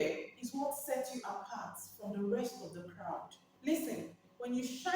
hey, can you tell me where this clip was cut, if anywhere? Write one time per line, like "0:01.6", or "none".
0:03.4